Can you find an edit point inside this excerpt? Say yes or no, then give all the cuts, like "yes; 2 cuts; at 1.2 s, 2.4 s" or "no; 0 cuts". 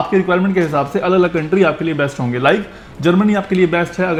no; 0 cuts